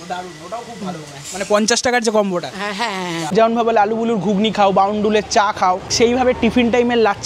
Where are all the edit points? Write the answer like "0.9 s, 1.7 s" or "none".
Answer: 3.2 s, 5.9 s